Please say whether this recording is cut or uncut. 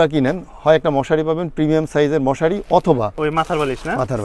cut